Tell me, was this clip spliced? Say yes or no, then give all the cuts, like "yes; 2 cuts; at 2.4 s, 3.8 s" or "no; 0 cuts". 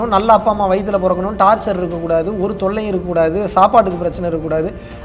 no; 0 cuts